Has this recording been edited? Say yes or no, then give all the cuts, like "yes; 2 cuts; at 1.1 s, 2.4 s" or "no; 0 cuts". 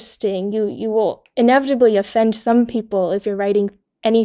no; 0 cuts